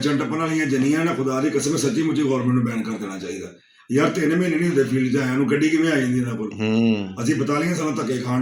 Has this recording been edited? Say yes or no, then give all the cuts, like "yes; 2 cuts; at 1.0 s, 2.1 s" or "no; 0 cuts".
no; 0 cuts